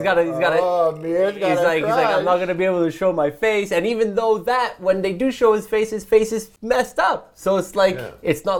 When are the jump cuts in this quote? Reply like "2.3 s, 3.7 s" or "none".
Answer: 6.5 s